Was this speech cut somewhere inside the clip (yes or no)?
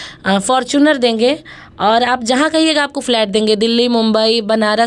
no